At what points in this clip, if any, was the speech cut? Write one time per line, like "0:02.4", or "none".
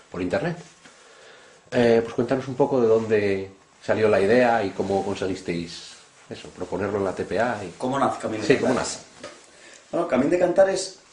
0:05.9